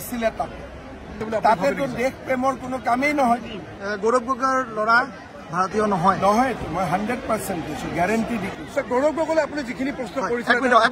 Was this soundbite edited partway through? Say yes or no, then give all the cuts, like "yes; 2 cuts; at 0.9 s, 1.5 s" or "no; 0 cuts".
yes; 2 cuts; at 1.2 s, 3.6 s